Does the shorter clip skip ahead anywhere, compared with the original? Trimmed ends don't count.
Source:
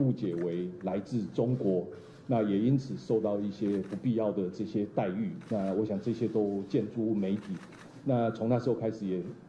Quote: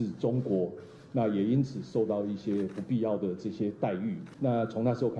yes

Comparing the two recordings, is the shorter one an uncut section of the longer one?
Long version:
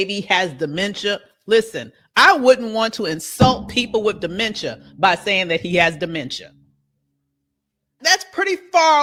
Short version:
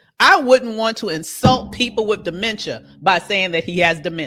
yes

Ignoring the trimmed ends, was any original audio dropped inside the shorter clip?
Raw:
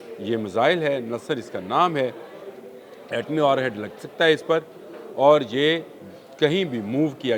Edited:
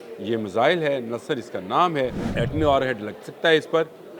yes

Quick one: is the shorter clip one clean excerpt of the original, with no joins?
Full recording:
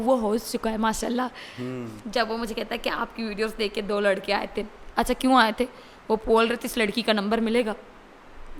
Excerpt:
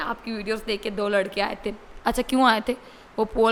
yes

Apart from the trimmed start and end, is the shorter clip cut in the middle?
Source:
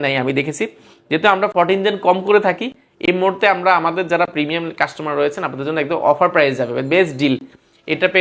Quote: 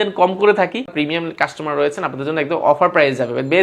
yes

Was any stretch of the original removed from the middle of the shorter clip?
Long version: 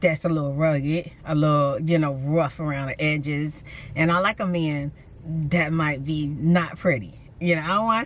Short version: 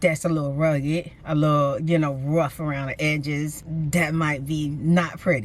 yes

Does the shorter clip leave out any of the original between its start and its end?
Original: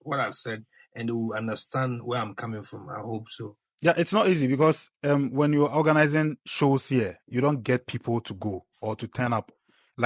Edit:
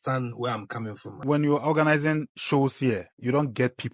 yes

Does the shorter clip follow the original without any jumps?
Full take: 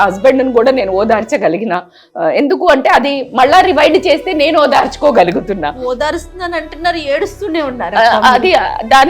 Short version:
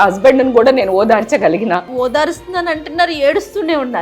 no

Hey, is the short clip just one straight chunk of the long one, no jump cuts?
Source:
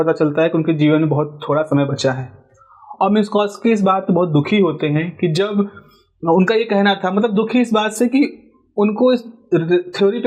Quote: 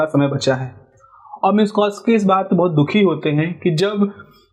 yes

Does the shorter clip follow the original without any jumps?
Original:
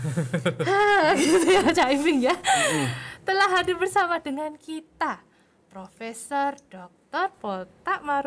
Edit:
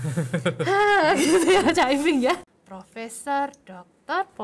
no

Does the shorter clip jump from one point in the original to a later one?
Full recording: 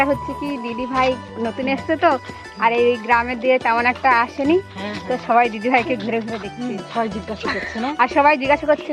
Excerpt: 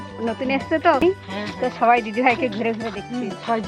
yes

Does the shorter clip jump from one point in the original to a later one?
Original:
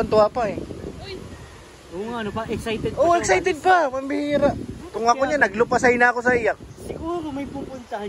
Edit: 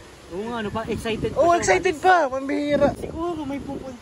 yes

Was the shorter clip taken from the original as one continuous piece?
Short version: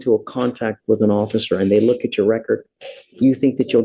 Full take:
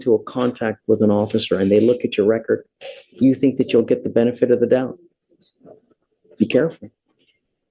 yes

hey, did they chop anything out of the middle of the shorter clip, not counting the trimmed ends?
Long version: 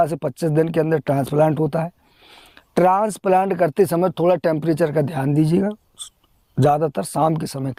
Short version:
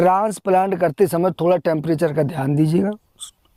no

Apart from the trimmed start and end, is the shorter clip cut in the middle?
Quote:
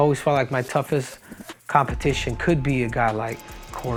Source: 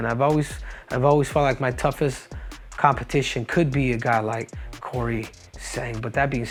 no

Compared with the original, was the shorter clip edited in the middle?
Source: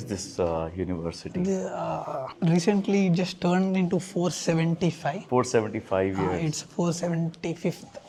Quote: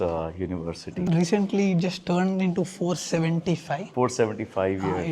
yes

